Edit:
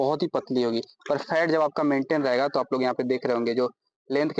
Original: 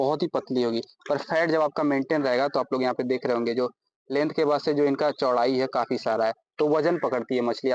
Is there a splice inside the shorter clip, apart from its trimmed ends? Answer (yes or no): no